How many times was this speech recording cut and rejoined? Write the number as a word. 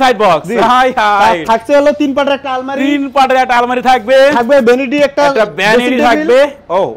zero